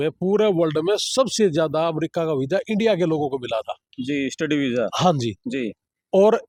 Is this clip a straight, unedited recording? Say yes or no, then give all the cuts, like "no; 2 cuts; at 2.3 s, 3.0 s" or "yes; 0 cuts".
yes; 0 cuts